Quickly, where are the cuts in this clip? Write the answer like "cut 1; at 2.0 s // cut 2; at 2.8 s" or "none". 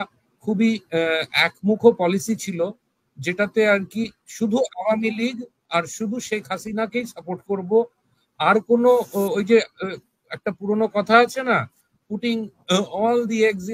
none